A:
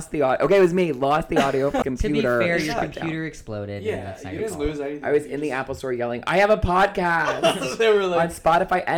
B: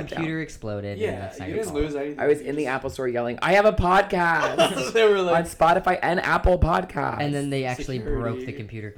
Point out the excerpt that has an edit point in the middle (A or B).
A